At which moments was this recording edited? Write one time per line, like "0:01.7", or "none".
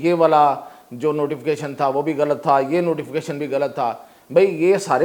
none